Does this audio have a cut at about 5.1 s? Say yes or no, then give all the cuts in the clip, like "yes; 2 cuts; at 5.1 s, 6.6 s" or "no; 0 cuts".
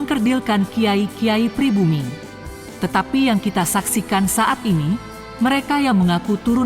no; 1 cut; at 2.2 s